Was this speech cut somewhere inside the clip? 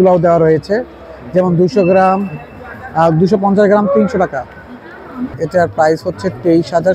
yes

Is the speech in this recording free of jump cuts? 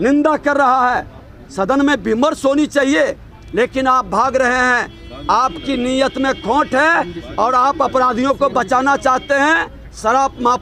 yes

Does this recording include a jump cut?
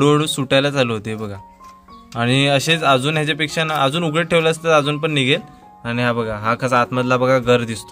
no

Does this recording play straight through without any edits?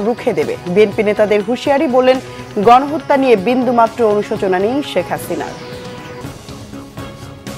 no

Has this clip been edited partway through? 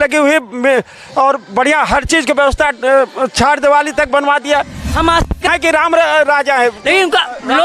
yes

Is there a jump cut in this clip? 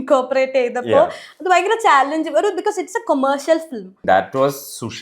yes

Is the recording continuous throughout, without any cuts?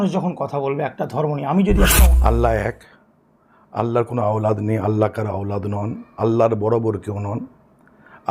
no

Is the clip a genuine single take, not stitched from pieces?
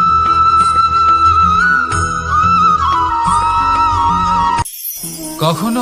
no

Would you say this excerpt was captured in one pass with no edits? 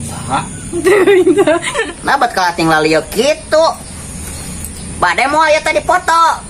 no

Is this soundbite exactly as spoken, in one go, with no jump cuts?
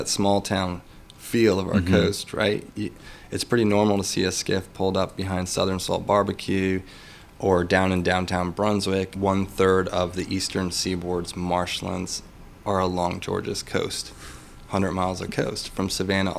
no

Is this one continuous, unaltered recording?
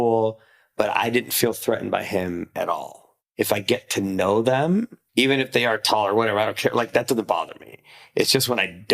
no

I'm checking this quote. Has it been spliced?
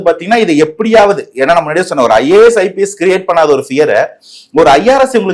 no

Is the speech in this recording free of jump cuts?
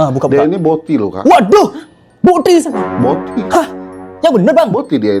yes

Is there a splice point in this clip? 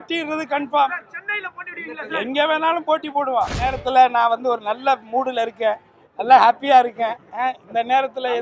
yes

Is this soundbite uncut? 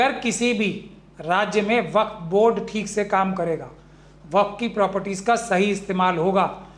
yes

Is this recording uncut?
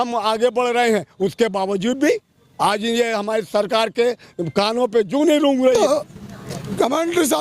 no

